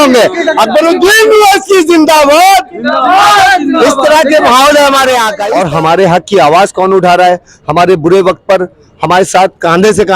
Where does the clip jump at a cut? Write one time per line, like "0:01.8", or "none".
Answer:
0:05.4